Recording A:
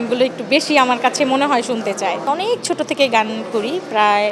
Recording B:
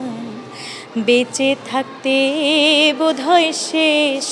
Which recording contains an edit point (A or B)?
A